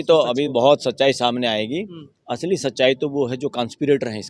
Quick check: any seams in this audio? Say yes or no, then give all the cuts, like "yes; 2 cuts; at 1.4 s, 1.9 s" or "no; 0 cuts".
no; 0 cuts